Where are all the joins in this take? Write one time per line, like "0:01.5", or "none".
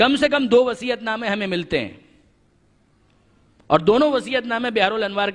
0:01.4